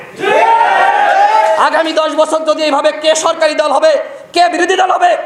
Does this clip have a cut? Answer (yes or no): no